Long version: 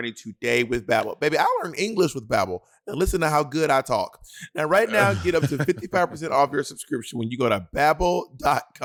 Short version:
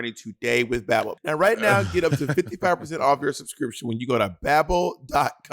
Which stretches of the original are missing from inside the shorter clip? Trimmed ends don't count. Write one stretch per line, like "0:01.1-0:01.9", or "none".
0:01.1-0:04.4